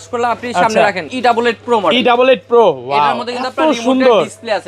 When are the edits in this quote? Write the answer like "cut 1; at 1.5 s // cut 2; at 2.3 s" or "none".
cut 1; at 1.1 s